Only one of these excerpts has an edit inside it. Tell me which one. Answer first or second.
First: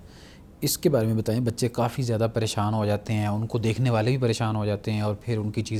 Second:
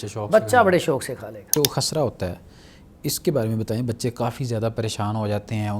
second